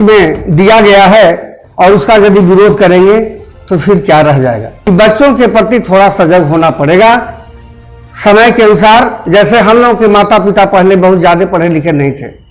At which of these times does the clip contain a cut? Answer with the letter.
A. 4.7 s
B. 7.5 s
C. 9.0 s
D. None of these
A